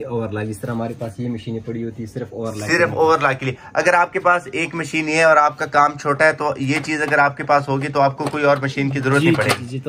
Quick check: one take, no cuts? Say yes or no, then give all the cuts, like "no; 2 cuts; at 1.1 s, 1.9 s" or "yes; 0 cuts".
yes; 0 cuts